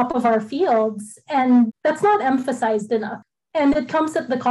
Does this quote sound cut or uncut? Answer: cut